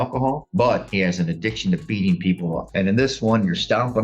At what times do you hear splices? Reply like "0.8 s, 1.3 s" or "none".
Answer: 2.6 s